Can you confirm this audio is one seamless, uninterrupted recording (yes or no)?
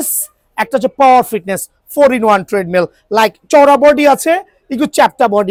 yes